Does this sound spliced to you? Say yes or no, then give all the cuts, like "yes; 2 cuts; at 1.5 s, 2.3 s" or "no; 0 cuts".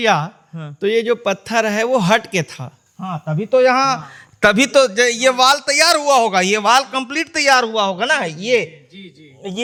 no; 0 cuts